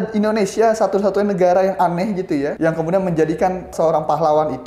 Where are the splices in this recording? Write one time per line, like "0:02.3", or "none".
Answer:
0:02.5
0:03.7

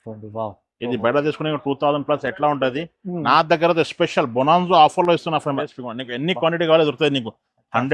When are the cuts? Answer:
0:05.6

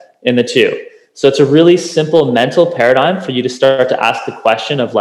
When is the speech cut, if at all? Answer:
none

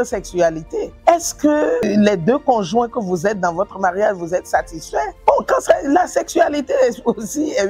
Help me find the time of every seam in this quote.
0:00.9

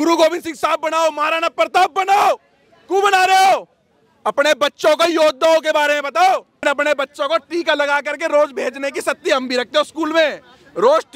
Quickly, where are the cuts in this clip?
0:06.6

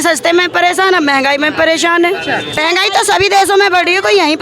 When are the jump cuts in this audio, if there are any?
0:02.6

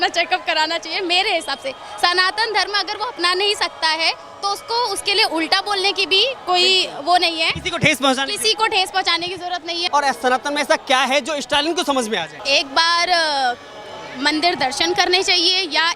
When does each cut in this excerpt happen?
0:09.8
0:12.3

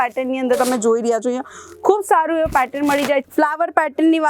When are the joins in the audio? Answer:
0:03.3

